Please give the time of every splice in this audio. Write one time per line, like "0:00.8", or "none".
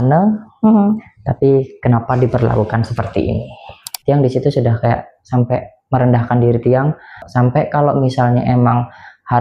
0:03.9